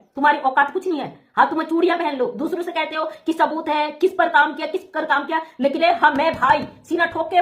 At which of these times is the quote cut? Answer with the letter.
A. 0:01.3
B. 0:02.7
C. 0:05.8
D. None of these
C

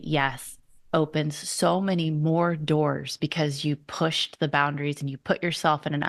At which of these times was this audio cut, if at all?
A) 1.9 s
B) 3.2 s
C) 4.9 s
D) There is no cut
D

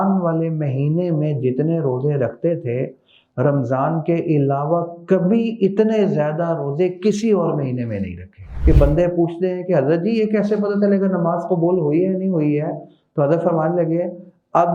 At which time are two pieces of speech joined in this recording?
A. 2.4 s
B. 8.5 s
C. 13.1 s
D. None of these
B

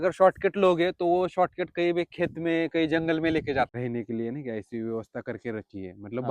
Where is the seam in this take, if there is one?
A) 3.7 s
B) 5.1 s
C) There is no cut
A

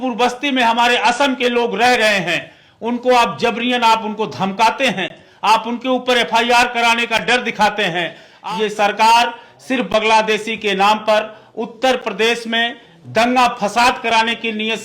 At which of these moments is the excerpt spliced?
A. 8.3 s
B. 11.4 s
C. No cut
A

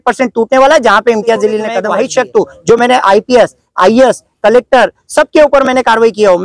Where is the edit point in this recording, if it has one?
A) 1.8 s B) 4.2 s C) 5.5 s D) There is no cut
A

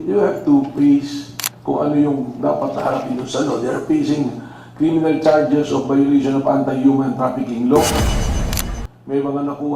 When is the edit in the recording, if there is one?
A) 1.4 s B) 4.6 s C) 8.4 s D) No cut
C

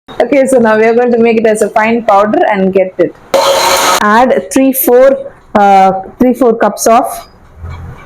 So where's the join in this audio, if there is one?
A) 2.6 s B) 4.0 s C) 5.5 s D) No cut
B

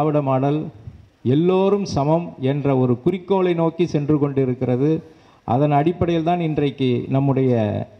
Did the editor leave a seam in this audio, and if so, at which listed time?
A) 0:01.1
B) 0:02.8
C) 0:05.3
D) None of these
D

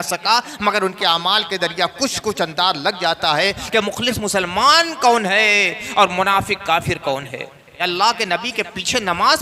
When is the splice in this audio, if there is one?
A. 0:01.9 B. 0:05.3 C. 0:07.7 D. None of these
C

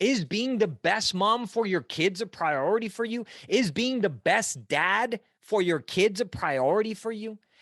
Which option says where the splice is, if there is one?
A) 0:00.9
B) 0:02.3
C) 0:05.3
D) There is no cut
D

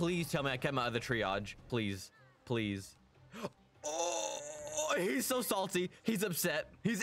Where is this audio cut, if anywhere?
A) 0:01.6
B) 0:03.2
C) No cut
A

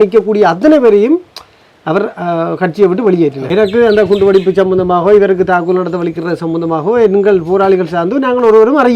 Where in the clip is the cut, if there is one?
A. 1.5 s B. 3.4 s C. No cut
B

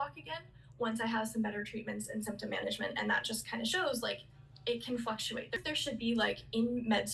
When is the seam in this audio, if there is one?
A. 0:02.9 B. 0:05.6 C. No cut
B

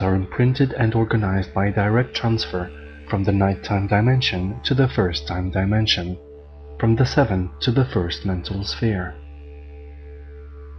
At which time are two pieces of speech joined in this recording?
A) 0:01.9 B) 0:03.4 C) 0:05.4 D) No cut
C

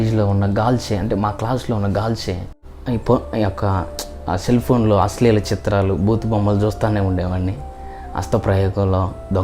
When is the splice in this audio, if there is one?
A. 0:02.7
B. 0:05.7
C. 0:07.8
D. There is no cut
A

